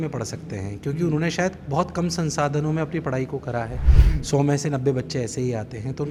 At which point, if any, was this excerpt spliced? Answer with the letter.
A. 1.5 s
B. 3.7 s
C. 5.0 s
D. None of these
D